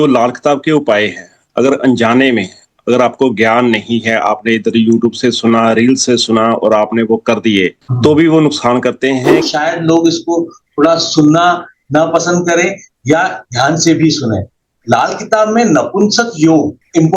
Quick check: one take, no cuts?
no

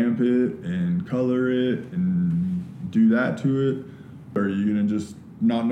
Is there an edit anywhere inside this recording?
yes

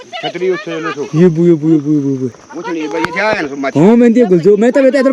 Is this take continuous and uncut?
yes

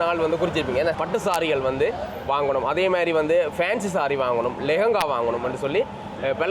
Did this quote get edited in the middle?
yes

